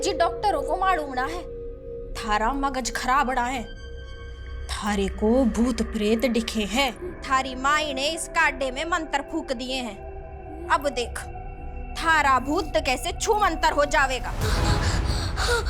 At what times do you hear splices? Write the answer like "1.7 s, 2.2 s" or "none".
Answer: 14.4 s